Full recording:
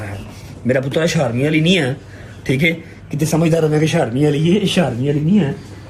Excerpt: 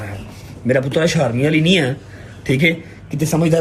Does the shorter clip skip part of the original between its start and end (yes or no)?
no